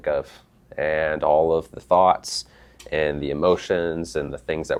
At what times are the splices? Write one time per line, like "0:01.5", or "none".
none